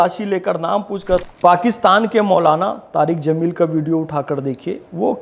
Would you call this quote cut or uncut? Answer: cut